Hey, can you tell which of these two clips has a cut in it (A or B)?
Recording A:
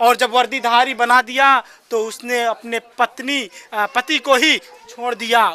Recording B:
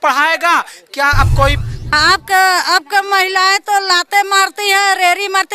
B